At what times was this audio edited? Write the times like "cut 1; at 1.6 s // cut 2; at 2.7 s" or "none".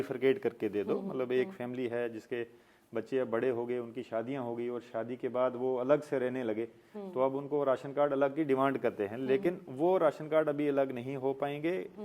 none